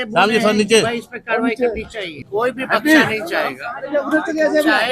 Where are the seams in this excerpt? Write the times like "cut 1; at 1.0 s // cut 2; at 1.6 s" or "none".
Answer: cut 1; at 2.1 s